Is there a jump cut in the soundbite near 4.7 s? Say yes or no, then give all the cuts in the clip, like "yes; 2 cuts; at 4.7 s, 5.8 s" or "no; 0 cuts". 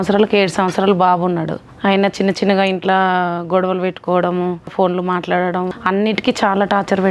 yes; 3 cuts; at 1.6 s, 4.7 s, 5.7 s